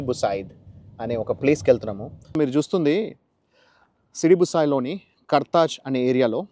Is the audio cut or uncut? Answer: cut